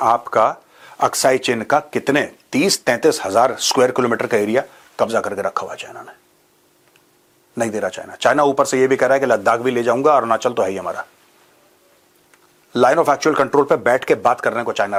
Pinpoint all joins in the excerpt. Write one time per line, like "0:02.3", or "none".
none